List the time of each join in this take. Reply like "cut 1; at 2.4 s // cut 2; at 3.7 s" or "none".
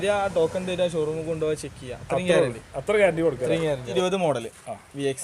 cut 1; at 3.9 s